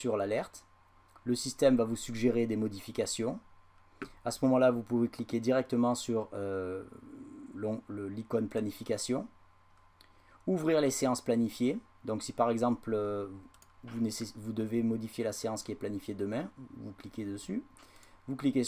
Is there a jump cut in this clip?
no; 0 cuts

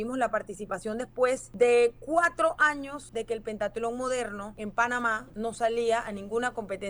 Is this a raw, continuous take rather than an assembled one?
no; 4 cuts; at 1.5 s, 3.0 s, 4.5 s, 5.3 s

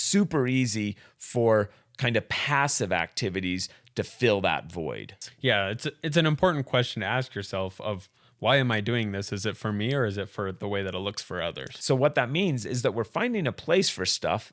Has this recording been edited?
yes; 2 cuts; at 5.2 s, 11.7 s

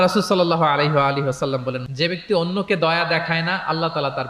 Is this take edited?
yes; 1 cut; at 1.8 s

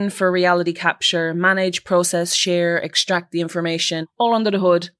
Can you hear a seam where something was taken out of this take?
yes; 1 cut; at 4.1 s

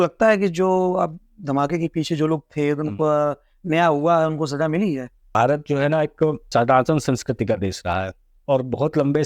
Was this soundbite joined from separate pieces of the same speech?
yes; 2 cuts; at 5.4 s, 6.4 s

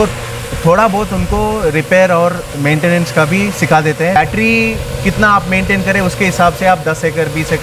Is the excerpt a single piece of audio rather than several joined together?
no; 1 cut; at 4.2 s

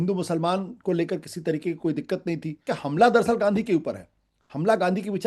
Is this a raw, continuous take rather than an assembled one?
no; 1 cut; at 2.6 s

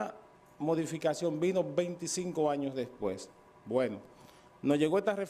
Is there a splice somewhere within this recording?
yes; 1 cut; at 3.1 s

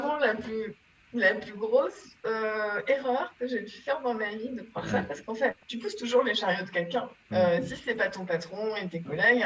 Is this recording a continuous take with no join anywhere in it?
no; 2 cuts; at 5.7 s, 7.2 s

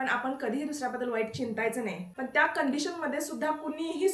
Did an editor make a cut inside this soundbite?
yes; 1 cut; at 2.0 s

